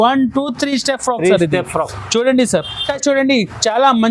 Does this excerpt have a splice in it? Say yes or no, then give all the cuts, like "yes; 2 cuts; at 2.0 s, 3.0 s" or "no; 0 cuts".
yes; 1 cut; at 2.9 s